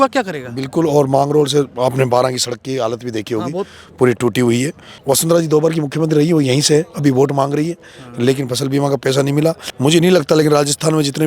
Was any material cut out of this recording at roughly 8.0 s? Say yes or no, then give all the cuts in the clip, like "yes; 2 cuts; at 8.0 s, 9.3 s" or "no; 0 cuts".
no; 2 cuts; at 4.9 s, 9.7 s